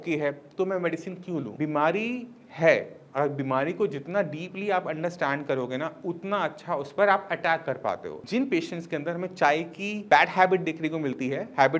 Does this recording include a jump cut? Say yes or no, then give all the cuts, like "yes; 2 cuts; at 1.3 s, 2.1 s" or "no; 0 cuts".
yes; 2 cuts; at 1.5 s, 8.1 s